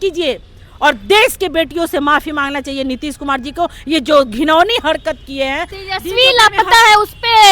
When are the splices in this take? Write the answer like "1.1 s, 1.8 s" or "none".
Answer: 5.7 s